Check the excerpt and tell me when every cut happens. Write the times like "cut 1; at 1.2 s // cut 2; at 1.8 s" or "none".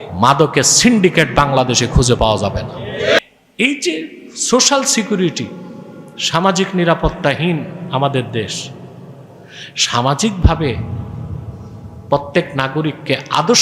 cut 1; at 3.2 s